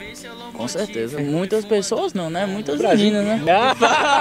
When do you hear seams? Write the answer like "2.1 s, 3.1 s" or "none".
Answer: 1.2 s, 3.4 s